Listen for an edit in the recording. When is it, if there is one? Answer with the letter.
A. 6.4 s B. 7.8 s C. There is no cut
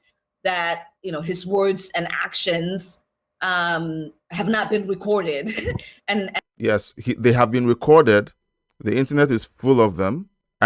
C